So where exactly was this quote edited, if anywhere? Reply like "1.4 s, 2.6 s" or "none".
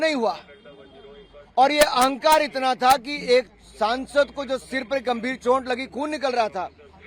none